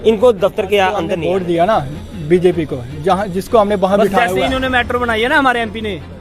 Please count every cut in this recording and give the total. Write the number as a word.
one